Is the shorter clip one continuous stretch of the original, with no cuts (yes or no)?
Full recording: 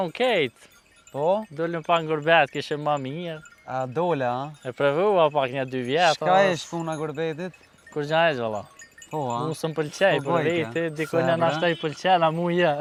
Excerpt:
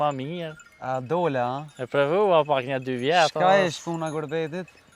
yes